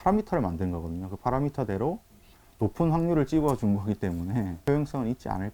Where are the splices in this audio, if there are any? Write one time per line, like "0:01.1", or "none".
0:04.6